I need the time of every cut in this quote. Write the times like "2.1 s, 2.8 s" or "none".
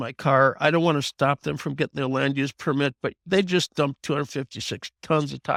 none